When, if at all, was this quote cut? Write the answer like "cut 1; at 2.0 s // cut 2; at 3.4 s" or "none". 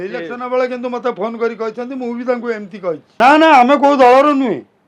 cut 1; at 3.1 s